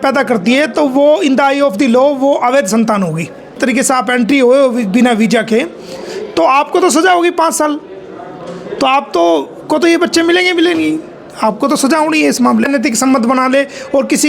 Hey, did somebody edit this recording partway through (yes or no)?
yes